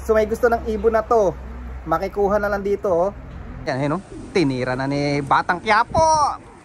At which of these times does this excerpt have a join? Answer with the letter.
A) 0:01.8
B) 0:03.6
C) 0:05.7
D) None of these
B